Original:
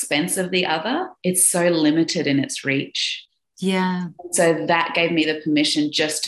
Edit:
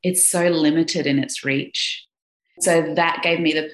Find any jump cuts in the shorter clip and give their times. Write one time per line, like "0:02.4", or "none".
0:02.4